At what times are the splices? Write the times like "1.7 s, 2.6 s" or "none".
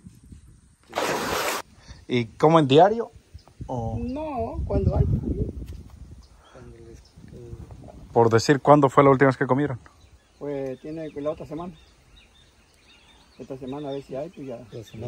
1.6 s